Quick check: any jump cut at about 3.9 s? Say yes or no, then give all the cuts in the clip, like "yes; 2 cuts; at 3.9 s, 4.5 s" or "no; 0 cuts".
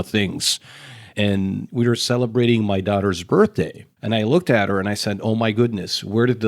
yes; 1 cut; at 3.9 s